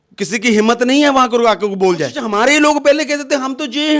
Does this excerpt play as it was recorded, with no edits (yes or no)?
no